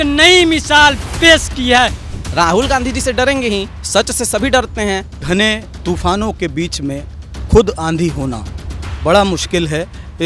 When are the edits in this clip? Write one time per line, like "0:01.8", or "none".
0:02.0
0:03.8
0:05.2